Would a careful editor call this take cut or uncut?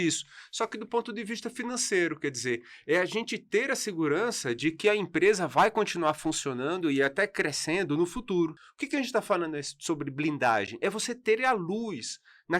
cut